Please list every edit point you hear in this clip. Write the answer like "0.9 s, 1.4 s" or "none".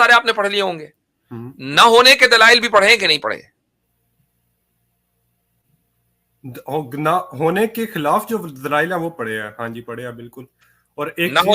none